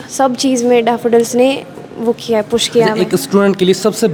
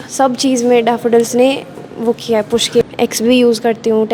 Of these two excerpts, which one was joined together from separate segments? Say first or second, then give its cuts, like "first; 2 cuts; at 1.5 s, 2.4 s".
second; 1 cut; at 2.8 s